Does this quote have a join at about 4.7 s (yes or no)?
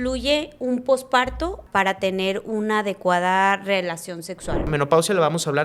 yes